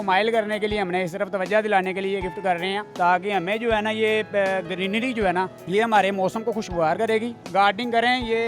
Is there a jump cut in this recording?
yes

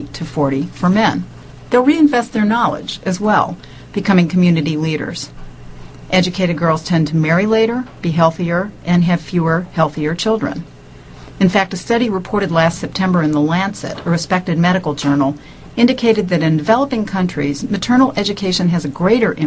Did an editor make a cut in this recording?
yes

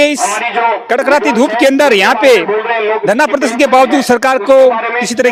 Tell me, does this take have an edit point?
no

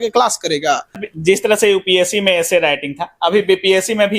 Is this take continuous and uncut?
no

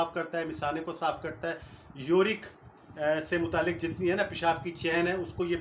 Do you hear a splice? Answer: no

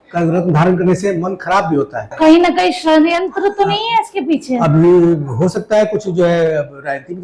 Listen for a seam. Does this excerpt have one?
yes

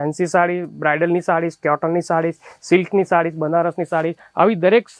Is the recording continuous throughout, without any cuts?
yes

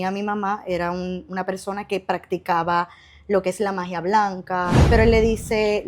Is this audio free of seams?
no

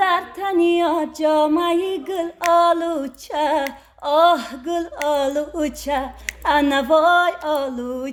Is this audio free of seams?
yes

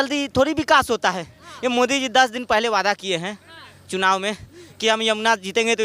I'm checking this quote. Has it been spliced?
no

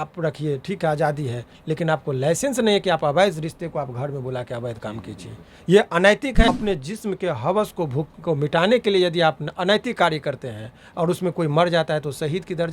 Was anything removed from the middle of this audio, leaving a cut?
yes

